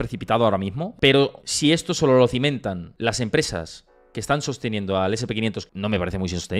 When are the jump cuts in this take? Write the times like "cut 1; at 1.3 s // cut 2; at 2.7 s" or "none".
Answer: cut 1; at 0.9 s // cut 2; at 1.4 s // cut 3; at 2.9 s // cut 4; at 5.7 s